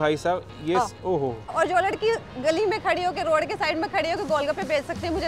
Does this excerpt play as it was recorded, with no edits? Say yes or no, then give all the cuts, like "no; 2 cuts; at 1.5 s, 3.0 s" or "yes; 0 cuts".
no; 1 cut; at 1.5 s